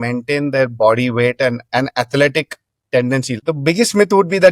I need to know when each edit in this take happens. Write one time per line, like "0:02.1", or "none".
0:03.3